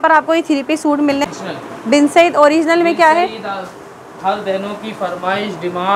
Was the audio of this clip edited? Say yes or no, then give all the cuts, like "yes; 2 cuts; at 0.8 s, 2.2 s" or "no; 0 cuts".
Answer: yes; 1 cut; at 1.2 s